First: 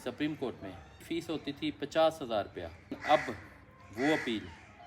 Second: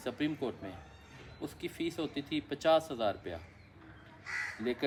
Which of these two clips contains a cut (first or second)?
first